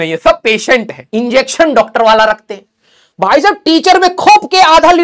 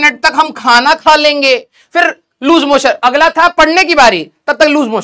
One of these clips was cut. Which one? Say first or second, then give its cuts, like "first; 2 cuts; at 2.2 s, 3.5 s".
first; 1 cut; at 1.0 s